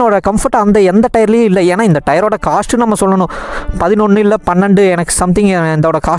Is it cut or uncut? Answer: uncut